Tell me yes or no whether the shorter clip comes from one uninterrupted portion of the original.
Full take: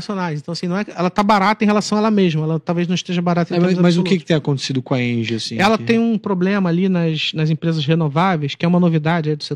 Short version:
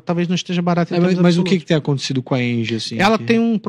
yes